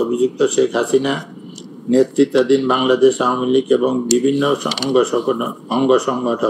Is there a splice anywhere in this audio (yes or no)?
no